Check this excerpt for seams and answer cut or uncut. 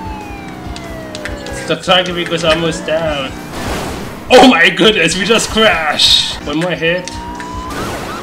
cut